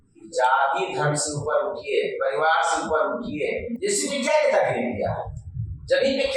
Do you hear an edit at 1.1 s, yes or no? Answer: no